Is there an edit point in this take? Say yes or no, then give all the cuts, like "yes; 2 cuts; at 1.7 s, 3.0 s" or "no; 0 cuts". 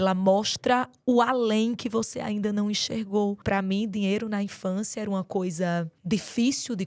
yes; 2 cuts; at 3.4 s, 6.0 s